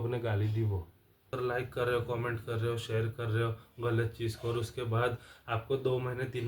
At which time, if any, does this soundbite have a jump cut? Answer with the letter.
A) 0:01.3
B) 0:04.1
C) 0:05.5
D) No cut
A